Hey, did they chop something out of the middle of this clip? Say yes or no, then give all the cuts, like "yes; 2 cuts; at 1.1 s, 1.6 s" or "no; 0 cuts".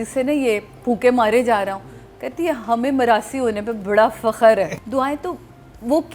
yes; 1 cut; at 4.7 s